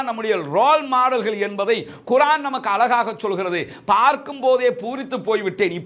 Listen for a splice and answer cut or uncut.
uncut